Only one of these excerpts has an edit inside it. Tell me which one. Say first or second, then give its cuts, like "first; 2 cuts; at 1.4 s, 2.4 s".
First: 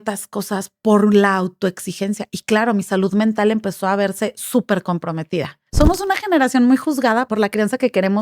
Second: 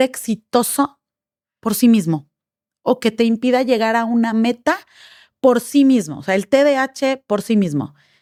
first; 2 cuts; at 5.6 s, 7.3 s